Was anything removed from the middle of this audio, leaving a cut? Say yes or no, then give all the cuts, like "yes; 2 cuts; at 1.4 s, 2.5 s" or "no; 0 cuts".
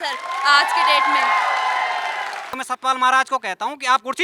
yes; 1 cut; at 2.6 s